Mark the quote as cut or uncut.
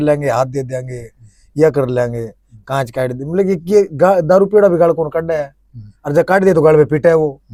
uncut